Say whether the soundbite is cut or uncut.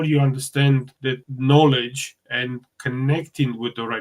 cut